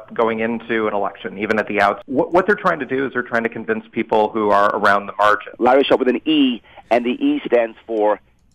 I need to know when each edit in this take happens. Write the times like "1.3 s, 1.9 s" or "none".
2.0 s, 5.5 s